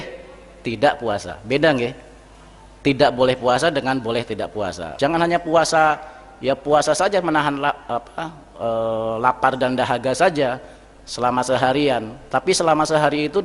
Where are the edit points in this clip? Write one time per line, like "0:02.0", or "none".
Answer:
0:04.8